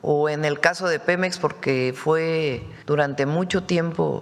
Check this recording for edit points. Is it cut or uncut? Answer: cut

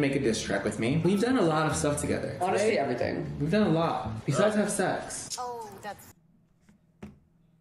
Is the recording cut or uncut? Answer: uncut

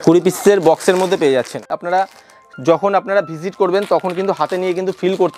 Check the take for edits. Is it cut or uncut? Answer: cut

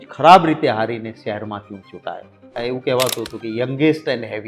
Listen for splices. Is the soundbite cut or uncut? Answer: cut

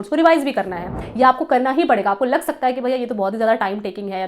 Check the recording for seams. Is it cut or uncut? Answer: cut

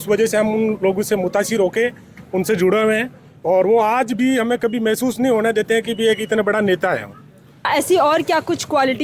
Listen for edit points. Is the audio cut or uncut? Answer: cut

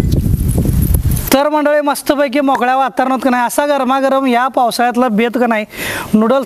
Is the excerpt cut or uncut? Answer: cut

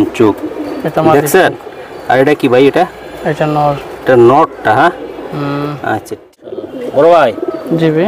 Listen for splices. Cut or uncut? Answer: cut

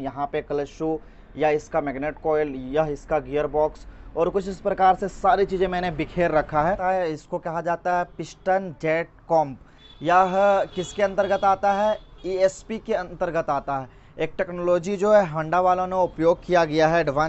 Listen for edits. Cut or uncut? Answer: cut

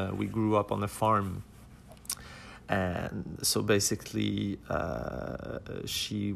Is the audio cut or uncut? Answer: uncut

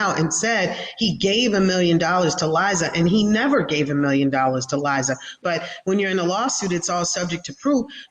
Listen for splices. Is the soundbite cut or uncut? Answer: cut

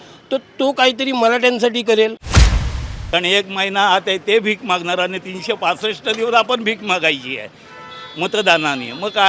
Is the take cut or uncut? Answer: cut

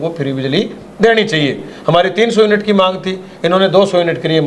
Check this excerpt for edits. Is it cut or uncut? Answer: uncut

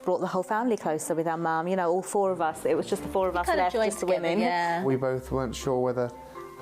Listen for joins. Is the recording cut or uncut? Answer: cut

